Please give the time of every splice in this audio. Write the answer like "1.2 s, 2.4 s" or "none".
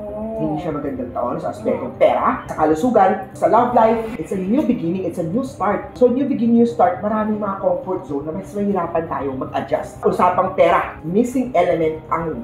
4.1 s, 10.0 s